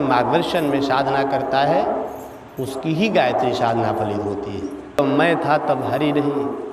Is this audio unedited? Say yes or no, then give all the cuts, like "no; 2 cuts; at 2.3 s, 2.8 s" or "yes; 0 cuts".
no; 1 cut; at 5.0 s